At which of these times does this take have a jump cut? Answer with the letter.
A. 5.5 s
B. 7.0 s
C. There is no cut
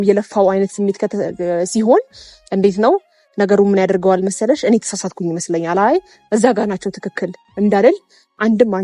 C